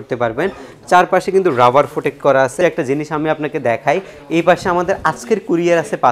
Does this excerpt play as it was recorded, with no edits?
no; 1 cut; at 2.6 s

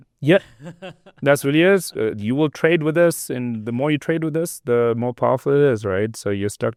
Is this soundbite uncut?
yes; 0 cuts

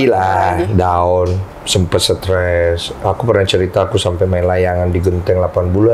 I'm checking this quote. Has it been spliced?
no; 0 cuts

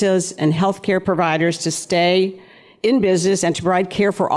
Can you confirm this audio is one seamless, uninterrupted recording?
no; 2 cuts; at 1.0 s, 3.6 s

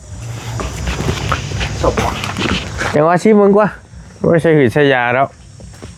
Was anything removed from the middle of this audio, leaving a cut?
no; 0 cuts

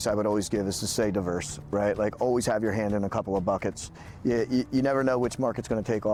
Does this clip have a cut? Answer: no; 0 cuts

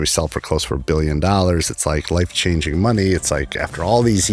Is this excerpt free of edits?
yes; 0 cuts

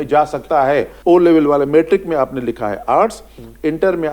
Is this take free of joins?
no; 1 cut; at 0.9 s

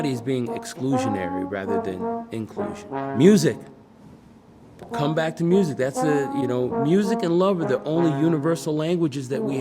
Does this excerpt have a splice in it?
yes; 1 cut; at 2.9 s

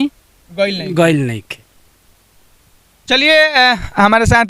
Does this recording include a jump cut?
no; 0 cuts

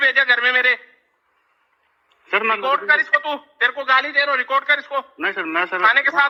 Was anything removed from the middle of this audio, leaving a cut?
no; 0 cuts

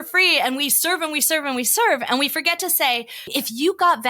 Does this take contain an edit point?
yes; 1 cut; at 3.2 s

